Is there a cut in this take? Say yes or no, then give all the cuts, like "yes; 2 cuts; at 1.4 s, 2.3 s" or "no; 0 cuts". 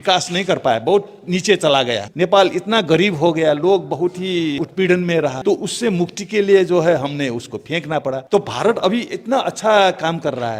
yes; 4 cuts; at 2.0 s, 4.6 s, 5.4 s, 8.2 s